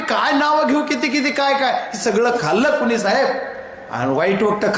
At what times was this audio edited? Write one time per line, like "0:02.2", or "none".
none